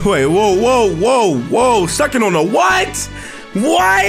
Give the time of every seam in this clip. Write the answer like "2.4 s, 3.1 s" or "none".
none